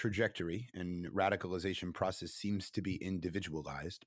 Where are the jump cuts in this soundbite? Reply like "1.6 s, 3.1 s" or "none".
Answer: none